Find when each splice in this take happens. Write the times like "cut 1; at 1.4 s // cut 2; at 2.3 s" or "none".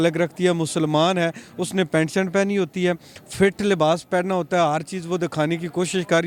none